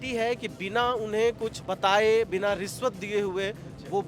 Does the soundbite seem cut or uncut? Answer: cut